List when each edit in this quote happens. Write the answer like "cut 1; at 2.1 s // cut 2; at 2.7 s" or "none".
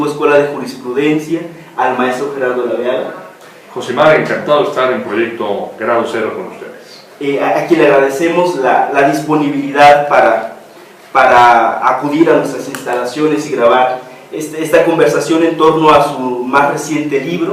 cut 1; at 15.8 s